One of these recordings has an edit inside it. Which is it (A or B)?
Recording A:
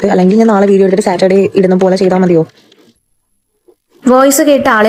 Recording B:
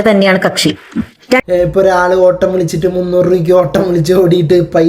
B